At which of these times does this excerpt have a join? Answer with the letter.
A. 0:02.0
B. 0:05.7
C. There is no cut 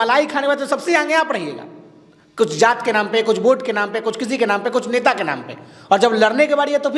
C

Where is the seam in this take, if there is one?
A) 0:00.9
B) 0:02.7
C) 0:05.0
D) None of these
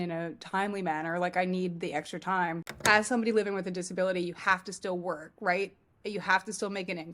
B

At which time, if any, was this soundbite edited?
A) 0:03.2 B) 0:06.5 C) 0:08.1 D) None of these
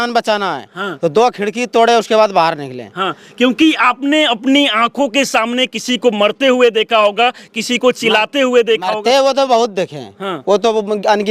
D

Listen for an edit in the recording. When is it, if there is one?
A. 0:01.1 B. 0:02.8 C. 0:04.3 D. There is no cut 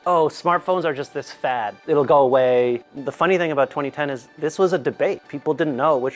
B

